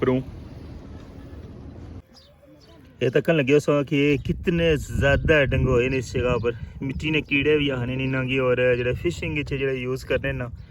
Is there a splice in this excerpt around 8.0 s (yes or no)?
no